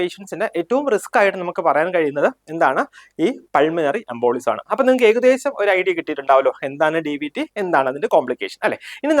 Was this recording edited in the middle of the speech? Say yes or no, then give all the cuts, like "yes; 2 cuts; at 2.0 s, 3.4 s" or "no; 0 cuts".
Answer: no; 0 cuts